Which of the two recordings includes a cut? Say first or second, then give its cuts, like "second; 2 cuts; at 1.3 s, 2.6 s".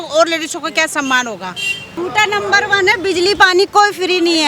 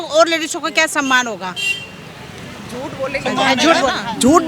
first; 1 cut; at 1.9 s